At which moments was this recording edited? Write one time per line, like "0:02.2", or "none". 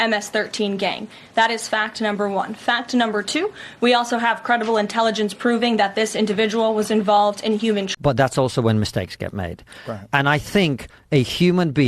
0:07.9